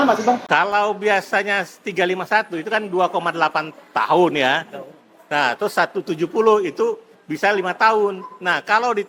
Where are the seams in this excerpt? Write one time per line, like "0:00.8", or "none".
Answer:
none